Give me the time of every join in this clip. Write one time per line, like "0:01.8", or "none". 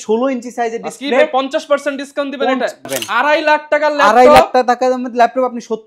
0:02.9